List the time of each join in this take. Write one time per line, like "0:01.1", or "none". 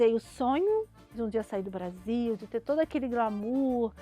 0:01.1